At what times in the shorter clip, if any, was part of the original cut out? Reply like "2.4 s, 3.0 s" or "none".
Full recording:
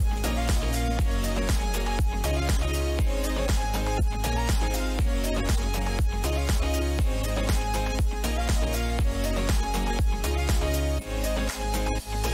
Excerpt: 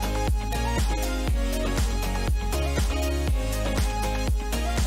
none